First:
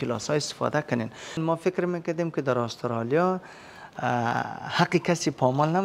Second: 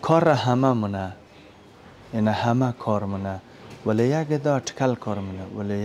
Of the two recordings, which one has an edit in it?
first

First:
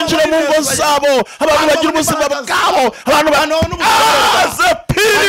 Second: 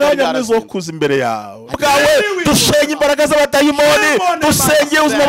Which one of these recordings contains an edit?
second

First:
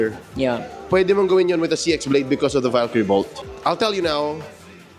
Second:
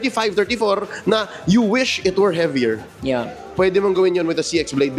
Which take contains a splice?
first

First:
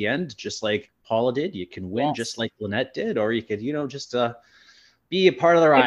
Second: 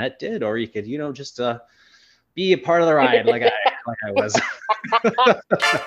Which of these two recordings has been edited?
first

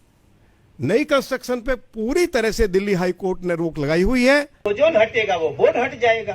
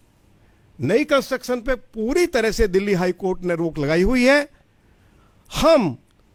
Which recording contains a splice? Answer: first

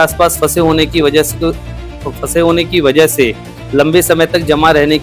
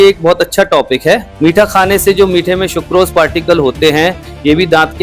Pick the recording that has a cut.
second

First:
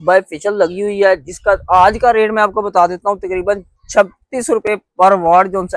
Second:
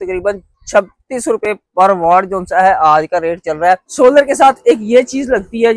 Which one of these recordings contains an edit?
second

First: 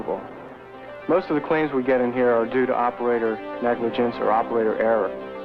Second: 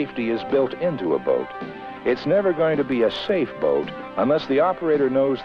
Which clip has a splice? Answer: second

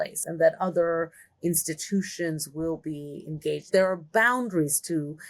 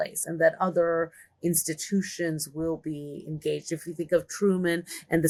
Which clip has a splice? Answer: first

